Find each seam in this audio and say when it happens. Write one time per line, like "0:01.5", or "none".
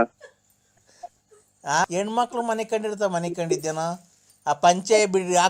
none